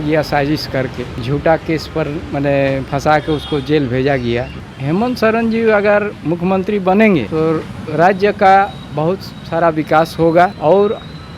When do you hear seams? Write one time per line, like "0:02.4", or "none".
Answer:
0:01.1
0:04.7
0:07.3
0:10.6